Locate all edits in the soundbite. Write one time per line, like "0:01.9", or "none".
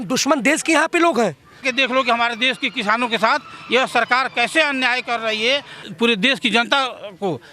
0:01.6
0:05.8